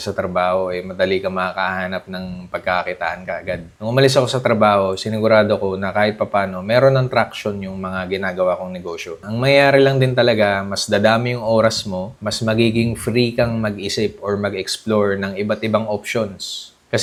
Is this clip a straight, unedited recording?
yes; 0 cuts

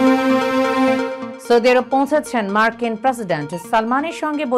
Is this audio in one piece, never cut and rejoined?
no; 1 cut; at 1.2 s

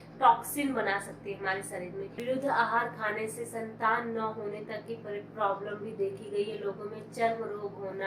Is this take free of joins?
no; 1 cut; at 2.1 s

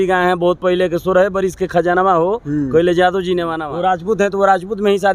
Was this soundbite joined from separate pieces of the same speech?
yes; 1 cut; at 3.6 s

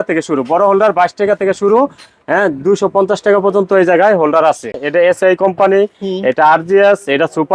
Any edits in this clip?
yes; 1 cut; at 4.8 s

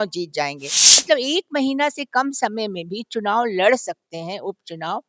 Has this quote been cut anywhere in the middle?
yes; 1 cut; at 1.0 s

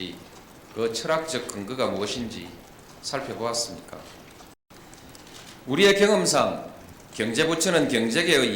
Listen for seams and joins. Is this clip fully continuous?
no; 1 cut; at 4.6 s

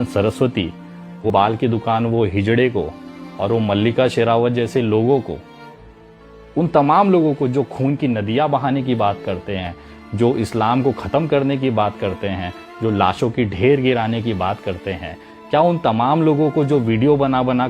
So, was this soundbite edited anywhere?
yes; 1 cut; at 1.3 s

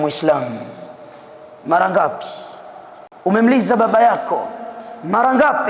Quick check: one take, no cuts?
yes; 0 cuts

